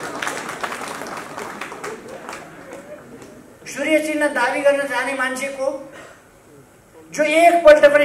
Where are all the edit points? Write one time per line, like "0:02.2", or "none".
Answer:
0:03.6